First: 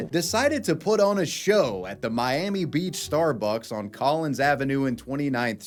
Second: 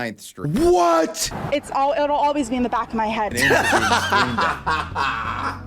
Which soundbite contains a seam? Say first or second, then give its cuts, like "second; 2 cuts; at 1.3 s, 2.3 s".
second; 2 cuts; at 1.3 s, 3.4 s